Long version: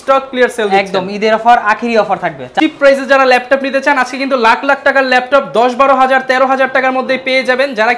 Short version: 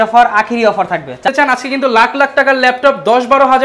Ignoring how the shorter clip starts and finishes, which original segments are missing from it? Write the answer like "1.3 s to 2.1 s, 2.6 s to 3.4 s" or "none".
2.6 s to 3.8 s